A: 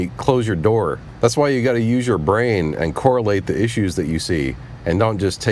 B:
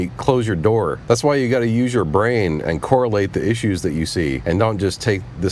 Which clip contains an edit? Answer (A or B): B